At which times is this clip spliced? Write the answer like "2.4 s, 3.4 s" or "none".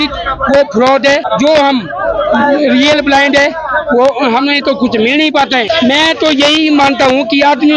1.3 s, 5.6 s